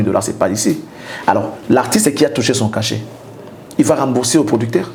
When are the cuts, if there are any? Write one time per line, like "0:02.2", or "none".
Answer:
none